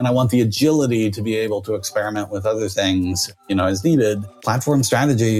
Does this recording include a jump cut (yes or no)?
yes